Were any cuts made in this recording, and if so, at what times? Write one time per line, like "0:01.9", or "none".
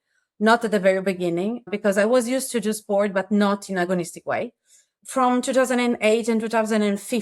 0:01.7
0:04.9